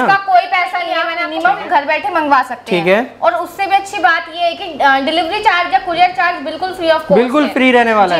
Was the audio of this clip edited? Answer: yes; 1 cut; at 1.2 s

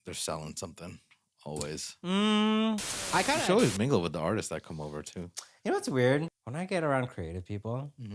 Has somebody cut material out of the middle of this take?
yes; 2 cuts; at 3.3 s, 6.4 s

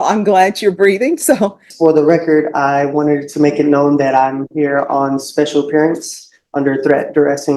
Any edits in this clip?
yes; 1 cut; at 1.7 s

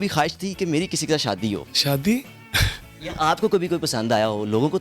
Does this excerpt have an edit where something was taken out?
no; 0 cuts

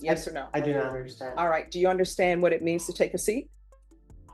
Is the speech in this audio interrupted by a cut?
no; 0 cuts

